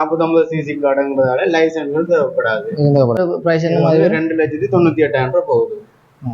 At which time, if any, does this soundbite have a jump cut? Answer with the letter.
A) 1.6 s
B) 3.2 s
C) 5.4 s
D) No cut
B